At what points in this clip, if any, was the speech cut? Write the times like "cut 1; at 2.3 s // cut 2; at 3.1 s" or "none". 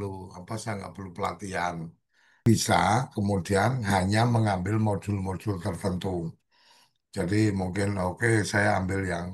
cut 1; at 2.4 s